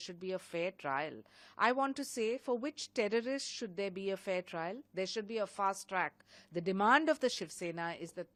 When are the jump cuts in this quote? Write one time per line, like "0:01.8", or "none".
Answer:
none